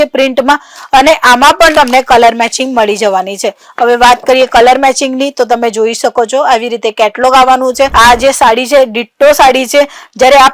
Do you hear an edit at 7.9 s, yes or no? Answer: yes